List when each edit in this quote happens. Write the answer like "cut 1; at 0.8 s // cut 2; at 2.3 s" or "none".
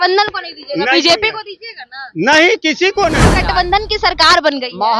cut 1; at 3.2 s